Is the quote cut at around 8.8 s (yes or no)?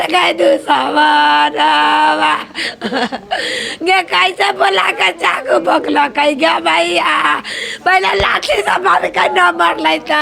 no